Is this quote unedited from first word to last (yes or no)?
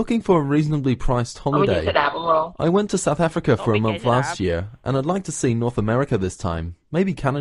yes